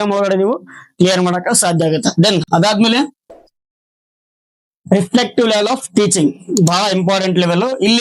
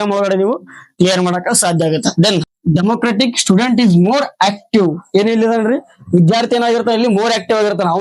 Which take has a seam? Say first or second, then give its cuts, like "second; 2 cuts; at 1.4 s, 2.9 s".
second; 1 cut; at 2.4 s